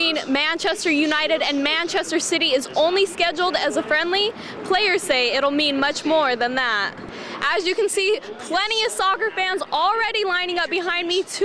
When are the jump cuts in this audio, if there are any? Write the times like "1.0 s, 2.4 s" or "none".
7.1 s